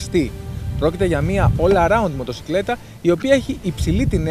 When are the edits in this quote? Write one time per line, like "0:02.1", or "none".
none